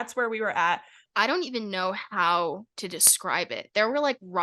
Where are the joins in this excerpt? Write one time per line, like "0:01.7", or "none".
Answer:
0:01.0